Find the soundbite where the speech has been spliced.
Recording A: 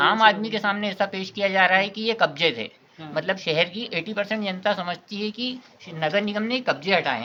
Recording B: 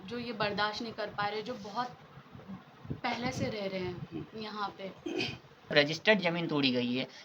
B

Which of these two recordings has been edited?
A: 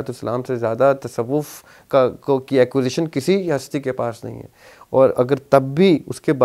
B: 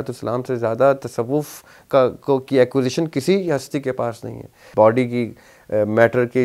B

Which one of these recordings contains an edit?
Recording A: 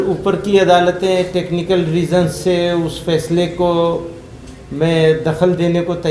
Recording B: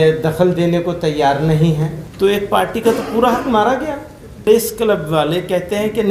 B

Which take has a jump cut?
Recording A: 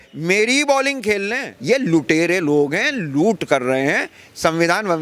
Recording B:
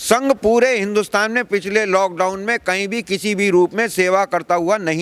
A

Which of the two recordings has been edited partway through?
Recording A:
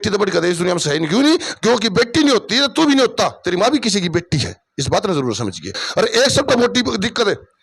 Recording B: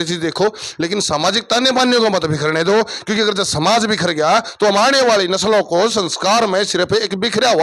A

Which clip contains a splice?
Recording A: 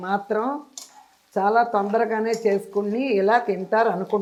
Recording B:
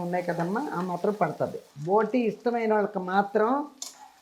B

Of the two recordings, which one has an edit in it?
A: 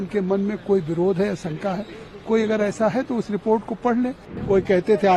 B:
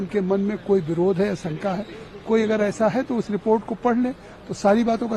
A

